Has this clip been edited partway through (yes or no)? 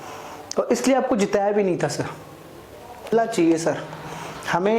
yes